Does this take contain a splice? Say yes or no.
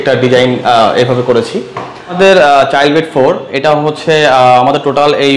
yes